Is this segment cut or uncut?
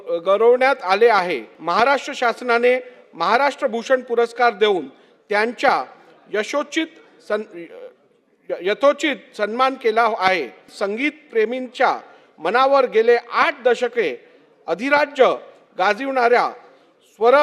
cut